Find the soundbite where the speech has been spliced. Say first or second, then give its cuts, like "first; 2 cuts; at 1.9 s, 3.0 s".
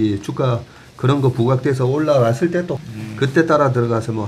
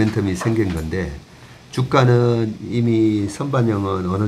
first; 1 cut; at 2.8 s